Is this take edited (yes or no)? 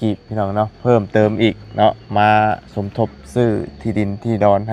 no